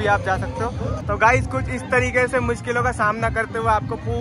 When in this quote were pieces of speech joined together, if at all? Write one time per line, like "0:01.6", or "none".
0:00.9